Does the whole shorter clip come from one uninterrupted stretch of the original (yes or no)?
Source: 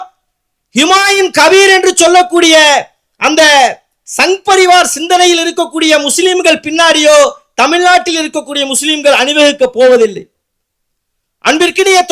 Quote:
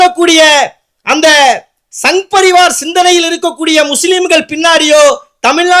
yes